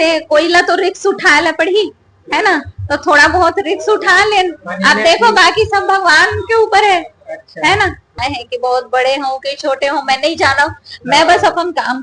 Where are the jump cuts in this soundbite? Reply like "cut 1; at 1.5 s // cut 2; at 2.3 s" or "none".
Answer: cut 1; at 8.2 s